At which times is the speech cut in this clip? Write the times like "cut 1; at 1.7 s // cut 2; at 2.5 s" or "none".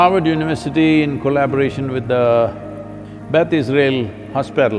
none